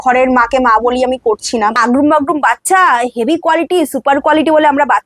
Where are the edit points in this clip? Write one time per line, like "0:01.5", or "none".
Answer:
0:01.8